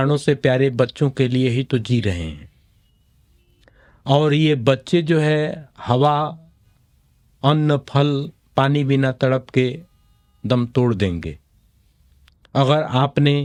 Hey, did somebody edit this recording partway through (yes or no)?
no